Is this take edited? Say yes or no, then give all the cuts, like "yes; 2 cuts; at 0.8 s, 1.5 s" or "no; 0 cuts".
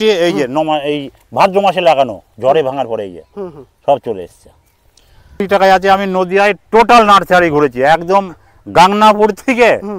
yes; 1 cut; at 5.4 s